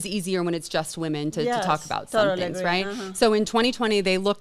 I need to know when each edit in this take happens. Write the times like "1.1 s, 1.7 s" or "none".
none